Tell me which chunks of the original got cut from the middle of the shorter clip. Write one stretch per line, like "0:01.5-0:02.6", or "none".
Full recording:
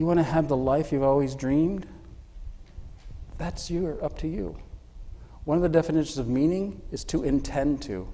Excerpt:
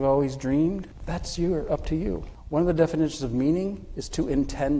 0:01.9-0:03.3
0:04.7-0:05.3